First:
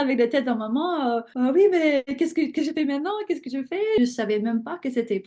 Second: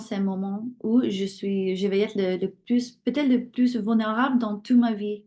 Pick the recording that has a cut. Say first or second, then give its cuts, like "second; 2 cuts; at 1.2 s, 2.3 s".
first; 3 cuts; at 1.3 s, 2.1 s, 4.0 s